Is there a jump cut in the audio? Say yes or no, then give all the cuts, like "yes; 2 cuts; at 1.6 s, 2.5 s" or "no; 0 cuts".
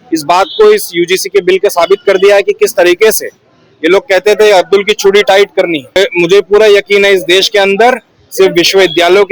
yes; 1 cut; at 6.0 s